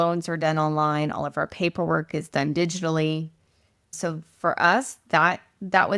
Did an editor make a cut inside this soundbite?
no; 0 cuts

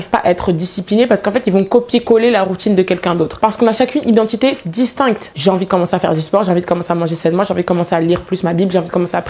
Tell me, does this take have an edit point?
yes; 2 cuts; at 3.3 s, 5.3 s

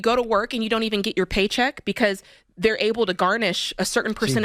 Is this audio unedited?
yes; 0 cuts

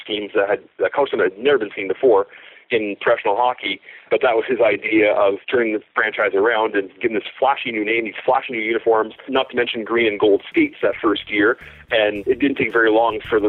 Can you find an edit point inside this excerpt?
yes; 4 cuts; at 4.0 s, 5.4 s, 9.3 s, 12.2 s

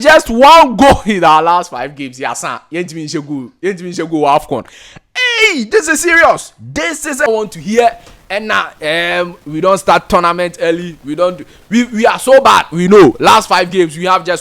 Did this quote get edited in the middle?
yes; 1 cut; at 7.3 s

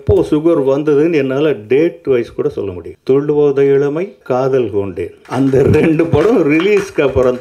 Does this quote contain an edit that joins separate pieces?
yes; 3 cuts; at 2.9 s, 4.2 s, 5.2 s

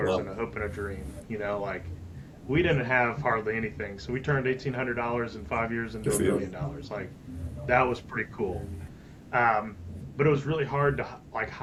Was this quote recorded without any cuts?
yes; 0 cuts

